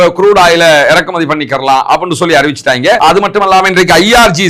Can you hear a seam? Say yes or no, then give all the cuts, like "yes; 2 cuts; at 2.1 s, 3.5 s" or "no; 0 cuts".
yes; 1 cut; at 3.0 s